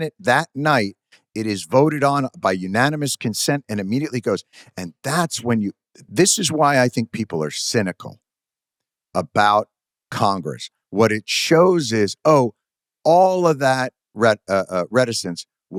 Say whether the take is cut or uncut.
uncut